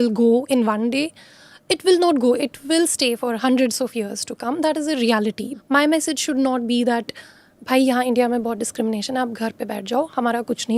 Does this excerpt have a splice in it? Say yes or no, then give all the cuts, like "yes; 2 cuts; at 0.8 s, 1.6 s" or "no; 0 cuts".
yes; 1 cut; at 5.5 s